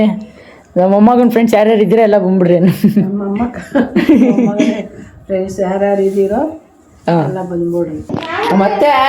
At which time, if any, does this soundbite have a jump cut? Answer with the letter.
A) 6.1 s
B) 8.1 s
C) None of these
B